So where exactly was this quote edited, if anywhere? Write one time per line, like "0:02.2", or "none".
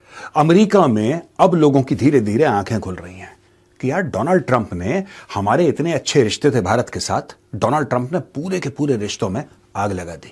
none